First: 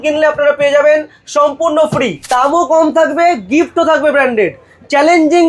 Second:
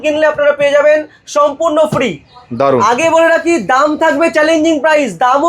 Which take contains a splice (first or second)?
first